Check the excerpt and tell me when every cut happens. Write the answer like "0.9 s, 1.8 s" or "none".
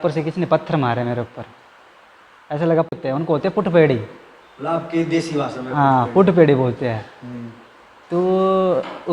2.9 s

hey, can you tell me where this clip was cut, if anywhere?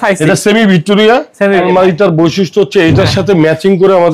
1.5 s

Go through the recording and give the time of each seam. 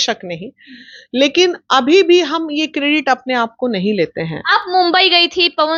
none

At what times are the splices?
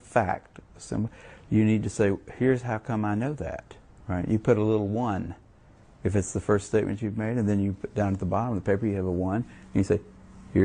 8.6 s

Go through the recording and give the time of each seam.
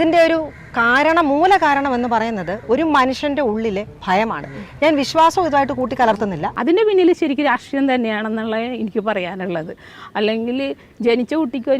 6.5 s

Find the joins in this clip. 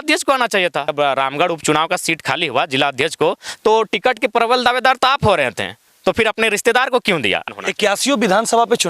0.9 s, 7.5 s

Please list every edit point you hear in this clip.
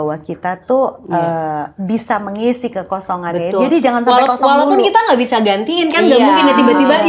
none

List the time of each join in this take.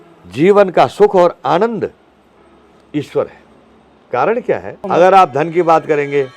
4.7 s

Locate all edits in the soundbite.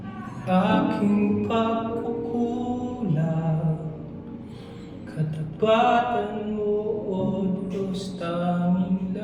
none

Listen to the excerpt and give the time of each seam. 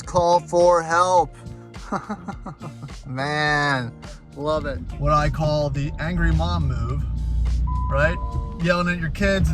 4.8 s

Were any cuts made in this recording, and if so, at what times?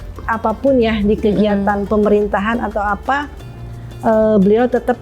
none

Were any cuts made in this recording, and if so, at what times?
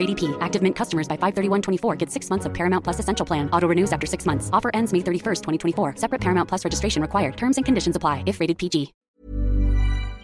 9.2 s

